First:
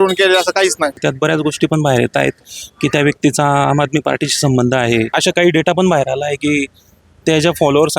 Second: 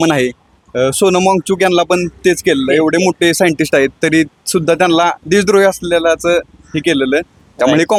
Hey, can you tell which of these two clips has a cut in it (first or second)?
first